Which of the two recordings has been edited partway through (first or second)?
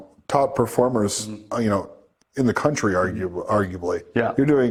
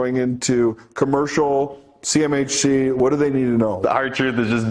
second